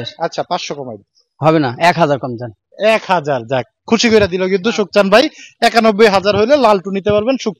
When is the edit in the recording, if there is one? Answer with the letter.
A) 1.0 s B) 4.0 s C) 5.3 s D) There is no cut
D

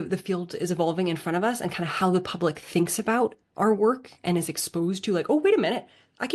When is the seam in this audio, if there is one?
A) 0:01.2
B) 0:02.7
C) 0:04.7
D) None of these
D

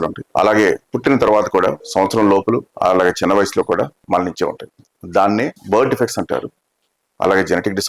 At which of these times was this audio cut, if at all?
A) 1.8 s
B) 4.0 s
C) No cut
B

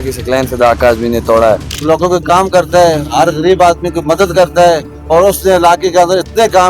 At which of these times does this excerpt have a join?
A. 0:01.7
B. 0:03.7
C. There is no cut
A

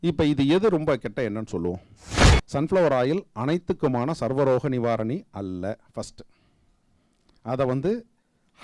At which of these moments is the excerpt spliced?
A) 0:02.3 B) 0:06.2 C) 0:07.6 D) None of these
A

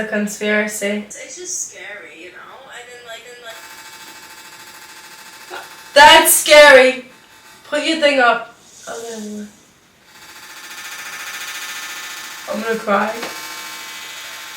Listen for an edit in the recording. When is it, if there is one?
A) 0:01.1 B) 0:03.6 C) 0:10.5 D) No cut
A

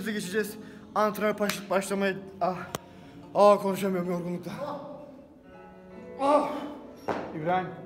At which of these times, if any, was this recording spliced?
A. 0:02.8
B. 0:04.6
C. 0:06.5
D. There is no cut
B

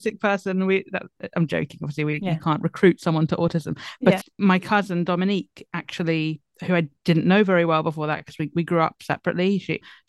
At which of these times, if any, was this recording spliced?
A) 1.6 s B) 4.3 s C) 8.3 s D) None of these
B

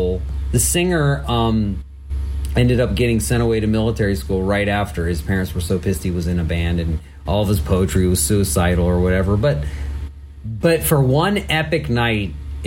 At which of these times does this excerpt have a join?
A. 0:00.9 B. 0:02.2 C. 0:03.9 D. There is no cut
D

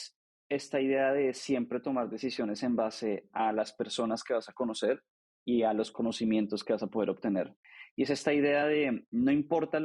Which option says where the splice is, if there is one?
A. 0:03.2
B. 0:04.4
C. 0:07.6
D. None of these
C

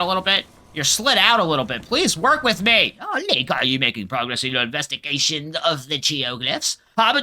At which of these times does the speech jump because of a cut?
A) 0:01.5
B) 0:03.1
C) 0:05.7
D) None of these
B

